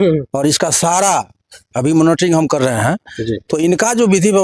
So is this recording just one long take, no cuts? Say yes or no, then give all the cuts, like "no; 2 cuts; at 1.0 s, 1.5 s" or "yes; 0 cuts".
yes; 0 cuts